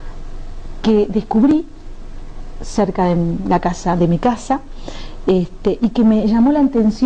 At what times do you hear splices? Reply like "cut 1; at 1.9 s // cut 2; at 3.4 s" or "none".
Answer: none